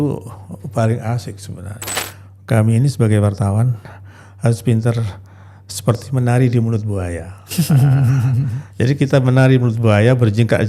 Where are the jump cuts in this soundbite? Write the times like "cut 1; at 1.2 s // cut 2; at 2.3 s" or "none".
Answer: cut 1; at 1.8 s